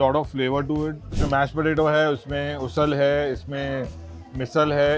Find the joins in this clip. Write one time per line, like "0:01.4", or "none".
0:01.1